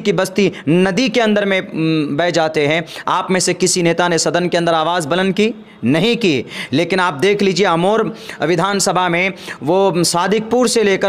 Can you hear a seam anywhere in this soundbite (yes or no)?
no